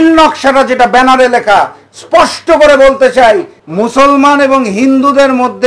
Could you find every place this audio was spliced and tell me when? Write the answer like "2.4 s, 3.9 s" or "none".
3.6 s